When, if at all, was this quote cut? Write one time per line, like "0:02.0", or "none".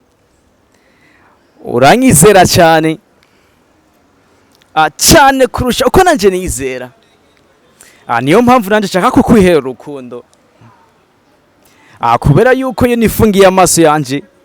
none